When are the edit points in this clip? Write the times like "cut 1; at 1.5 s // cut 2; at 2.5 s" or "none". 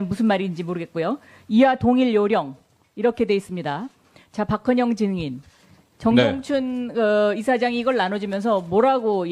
cut 1; at 1.5 s